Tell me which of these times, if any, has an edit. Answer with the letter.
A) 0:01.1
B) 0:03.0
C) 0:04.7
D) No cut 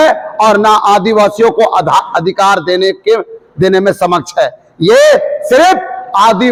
D